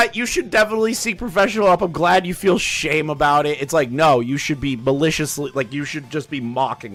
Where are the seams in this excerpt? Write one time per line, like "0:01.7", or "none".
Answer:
none